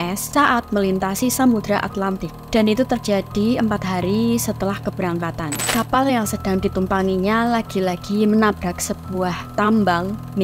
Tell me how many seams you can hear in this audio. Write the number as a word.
one